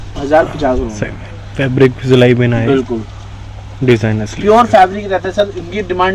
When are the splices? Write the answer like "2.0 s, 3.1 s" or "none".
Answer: none

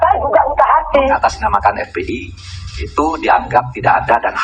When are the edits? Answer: 1.2 s

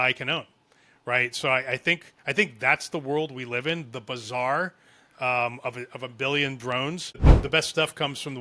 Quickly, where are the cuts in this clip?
7.3 s

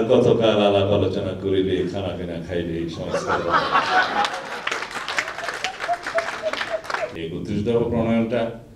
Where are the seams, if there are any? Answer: 7.0 s

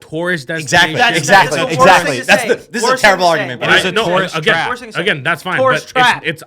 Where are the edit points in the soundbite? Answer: none

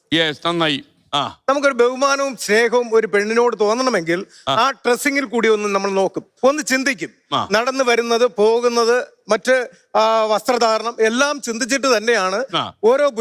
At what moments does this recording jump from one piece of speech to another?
1.0 s

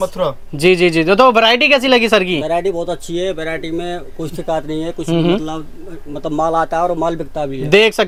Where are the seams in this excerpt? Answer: none

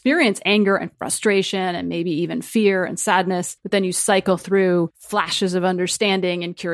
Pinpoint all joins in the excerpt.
3.5 s, 5.0 s

